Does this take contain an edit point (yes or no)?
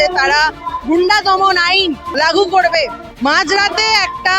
yes